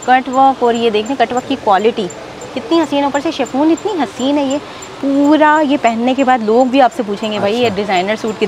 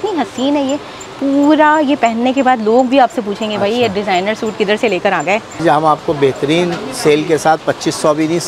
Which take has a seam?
second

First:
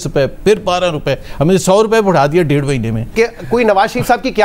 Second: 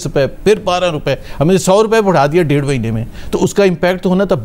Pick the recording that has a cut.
first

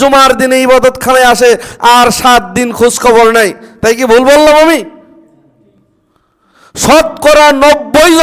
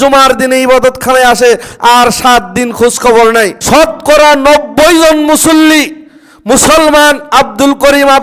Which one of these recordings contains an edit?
second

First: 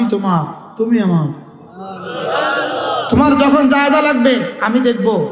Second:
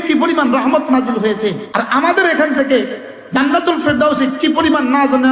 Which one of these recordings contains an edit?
second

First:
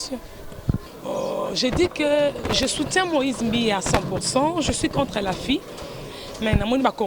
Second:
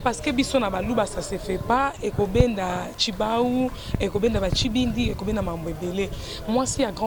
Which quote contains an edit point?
first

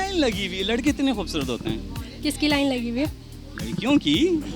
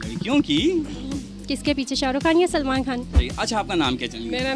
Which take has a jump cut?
second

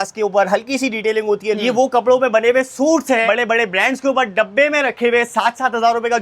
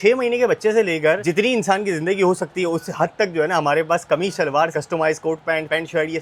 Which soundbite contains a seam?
first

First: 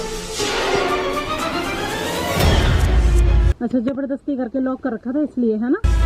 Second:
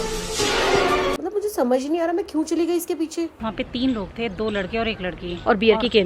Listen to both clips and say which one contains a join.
second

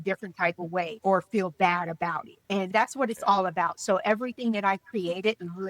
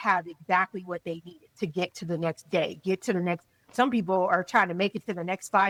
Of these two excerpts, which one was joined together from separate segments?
first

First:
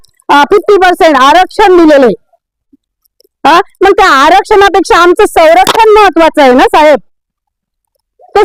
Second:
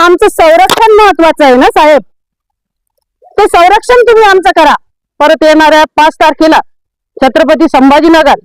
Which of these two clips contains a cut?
second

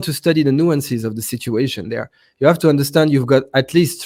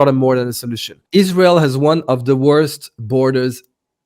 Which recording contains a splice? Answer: second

